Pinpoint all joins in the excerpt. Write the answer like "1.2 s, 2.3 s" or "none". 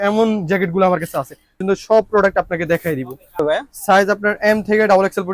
1.6 s, 3.4 s